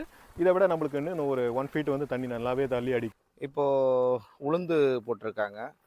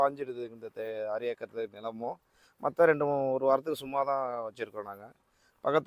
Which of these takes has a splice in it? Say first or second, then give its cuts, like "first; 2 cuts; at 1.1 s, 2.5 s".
first; 1 cut; at 3.1 s